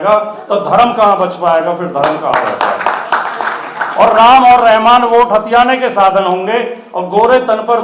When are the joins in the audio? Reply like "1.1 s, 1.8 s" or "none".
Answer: none